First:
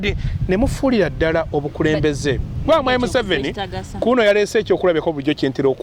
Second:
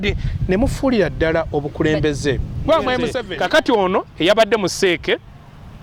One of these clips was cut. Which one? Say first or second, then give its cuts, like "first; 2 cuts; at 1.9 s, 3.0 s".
second; 1 cut; at 3.2 s